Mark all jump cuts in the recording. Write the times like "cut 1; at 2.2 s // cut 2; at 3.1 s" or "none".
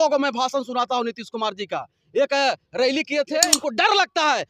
cut 1; at 3.5 s

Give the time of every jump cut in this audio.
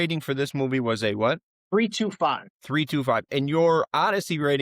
cut 1; at 1.5 s // cut 2; at 2.5 s

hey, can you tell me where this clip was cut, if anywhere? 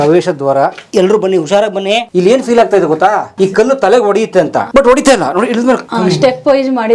cut 1; at 0.8 s // cut 2; at 2.1 s // cut 3; at 3.3 s // cut 4; at 4.7 s // cut 5; at 5.9 s

